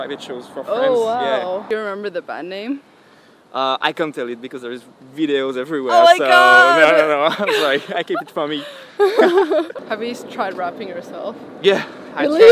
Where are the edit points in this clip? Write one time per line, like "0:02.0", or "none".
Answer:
0:01.6
0:09.7